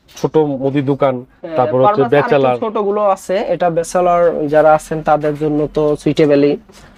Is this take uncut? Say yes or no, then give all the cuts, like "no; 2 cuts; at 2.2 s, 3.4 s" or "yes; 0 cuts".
yes; 0 cuts